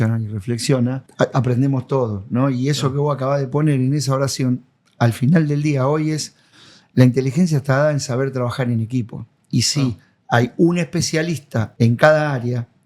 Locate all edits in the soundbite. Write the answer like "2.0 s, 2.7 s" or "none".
1.0 s, 11.6 s